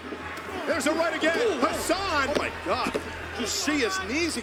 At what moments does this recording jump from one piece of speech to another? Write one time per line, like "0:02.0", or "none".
none